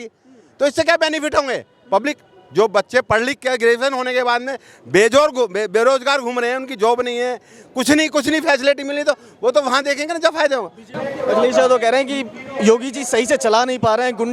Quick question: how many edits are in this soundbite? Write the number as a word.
one